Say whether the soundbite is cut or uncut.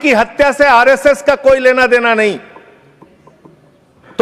uncut